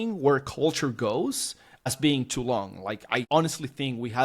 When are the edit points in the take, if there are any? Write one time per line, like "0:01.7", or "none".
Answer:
0:01.9
0:03.3